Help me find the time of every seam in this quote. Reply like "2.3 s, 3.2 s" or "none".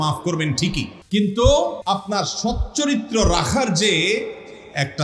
0.9 s, 1.8 s